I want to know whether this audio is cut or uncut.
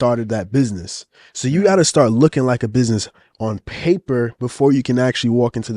uncut